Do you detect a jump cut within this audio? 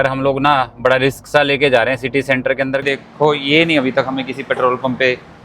yes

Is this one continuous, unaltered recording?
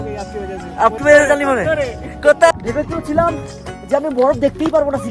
no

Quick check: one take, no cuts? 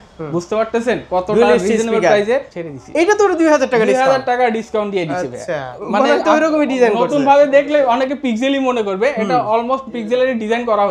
no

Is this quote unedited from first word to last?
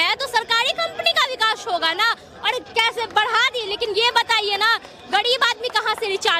yes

